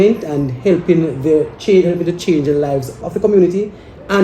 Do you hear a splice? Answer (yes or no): yes